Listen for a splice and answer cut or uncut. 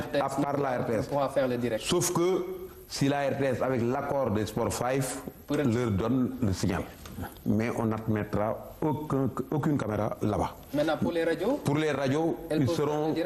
uncut